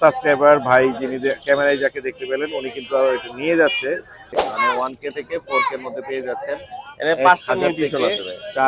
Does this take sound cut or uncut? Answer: cut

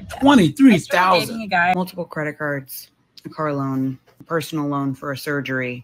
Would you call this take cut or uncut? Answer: cut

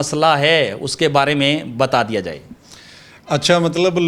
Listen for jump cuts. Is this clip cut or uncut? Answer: uncut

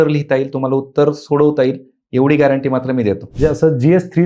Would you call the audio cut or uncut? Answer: cut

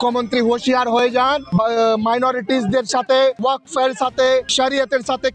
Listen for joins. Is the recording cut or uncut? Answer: cut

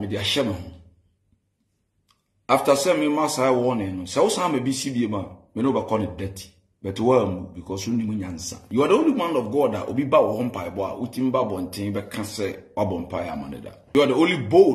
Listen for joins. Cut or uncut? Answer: cut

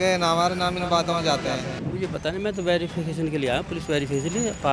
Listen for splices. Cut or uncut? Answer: cut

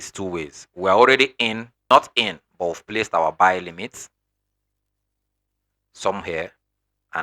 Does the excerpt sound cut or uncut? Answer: cut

